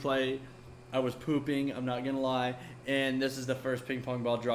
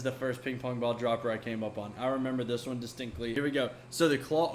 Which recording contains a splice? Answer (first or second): second